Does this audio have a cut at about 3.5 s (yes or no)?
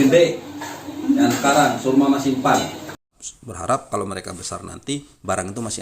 yes